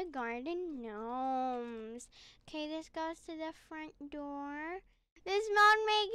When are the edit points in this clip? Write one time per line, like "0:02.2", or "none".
0:05.1